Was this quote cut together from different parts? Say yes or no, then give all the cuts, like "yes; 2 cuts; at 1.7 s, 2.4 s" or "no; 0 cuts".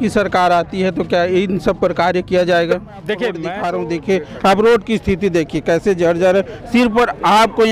yes; 1 cut; at 3.5 s